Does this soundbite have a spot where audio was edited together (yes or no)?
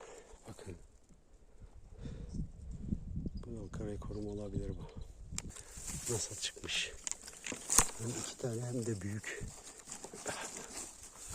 yes